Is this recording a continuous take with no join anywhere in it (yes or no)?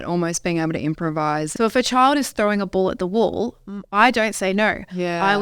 no